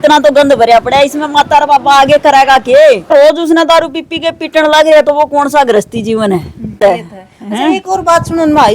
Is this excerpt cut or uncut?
cut